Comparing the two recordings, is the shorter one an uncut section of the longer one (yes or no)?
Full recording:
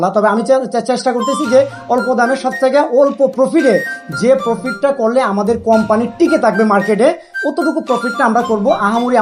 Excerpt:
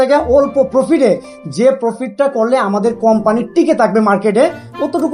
yes